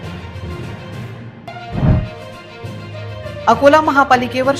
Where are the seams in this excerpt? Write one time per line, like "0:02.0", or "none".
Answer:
0:01.4